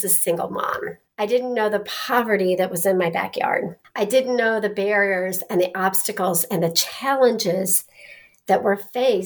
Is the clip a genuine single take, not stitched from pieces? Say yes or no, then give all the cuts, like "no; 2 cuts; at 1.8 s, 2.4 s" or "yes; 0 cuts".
no; 2 cuts; at 1.0 s, 3.8 s